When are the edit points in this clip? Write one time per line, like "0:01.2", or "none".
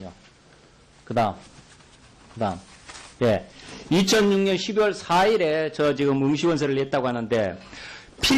0:02.0